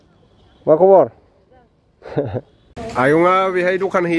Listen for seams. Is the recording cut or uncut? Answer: cut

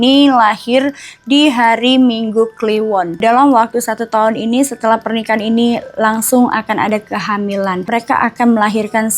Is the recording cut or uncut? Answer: cut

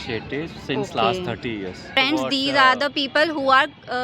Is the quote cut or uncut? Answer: cut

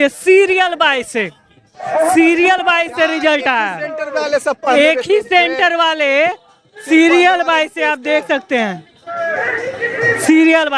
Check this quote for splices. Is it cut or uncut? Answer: uncut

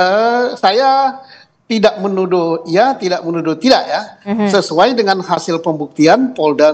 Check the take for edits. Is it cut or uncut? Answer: uncut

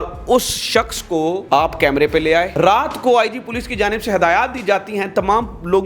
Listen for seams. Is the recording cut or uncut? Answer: cut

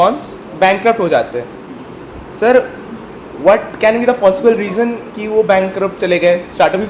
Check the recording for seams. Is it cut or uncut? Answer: uncut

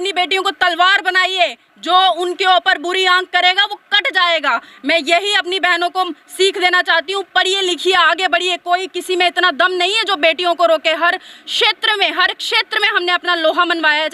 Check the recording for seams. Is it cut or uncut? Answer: uncut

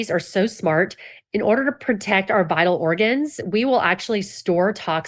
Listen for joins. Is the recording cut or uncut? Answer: cut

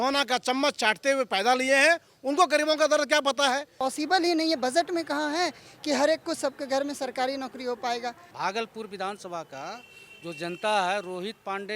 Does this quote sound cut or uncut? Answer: cut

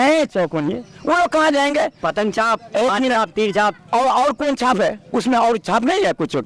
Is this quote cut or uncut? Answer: uncut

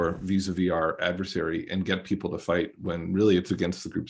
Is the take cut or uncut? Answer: uncut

